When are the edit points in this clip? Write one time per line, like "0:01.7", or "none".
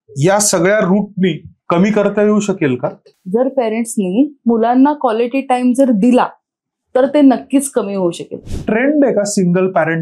0:03.1
0:08.4